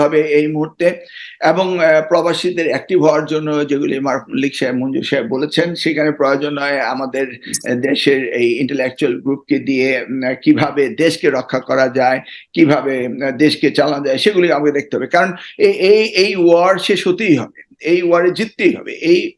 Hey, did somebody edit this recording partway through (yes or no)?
no